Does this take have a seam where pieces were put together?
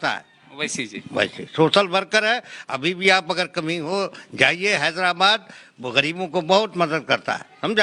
no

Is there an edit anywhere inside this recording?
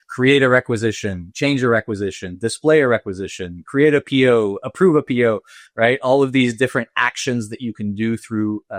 no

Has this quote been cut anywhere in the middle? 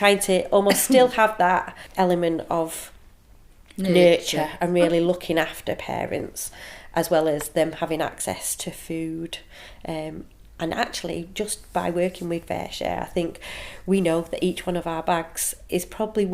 yes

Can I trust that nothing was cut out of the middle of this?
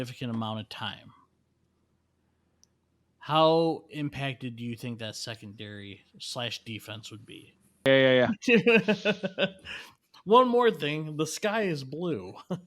no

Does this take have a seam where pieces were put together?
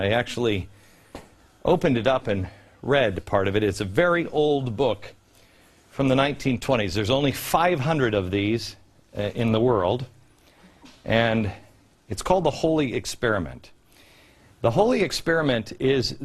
yes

